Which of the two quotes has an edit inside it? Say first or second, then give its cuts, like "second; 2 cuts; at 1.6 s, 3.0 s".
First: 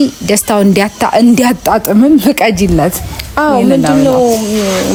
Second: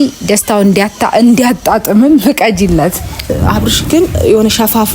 second; 1 cut; at 3.3 s